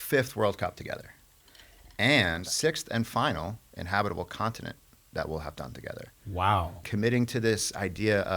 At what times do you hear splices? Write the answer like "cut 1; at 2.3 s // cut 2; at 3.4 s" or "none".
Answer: cut 1; at 2.5 s // cut 2; at 6.8 s